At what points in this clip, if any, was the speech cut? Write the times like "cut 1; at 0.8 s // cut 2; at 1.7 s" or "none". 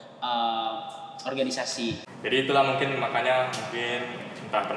cut 1; at 2.1 s